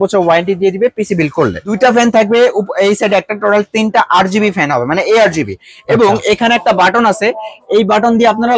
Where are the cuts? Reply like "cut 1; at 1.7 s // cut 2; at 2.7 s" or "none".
cut 1; at 1.6 s